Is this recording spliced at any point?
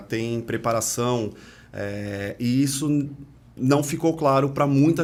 no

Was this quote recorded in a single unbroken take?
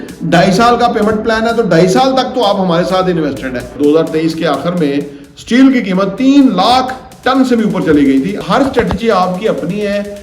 no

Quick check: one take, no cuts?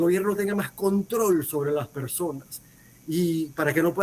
yes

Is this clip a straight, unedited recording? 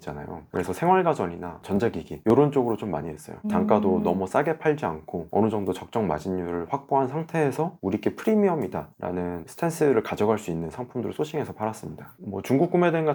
yes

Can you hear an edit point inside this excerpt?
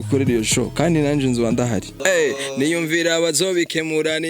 yes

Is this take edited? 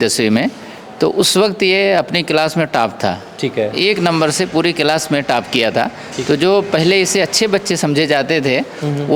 no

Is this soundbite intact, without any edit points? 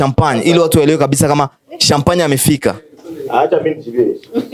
yes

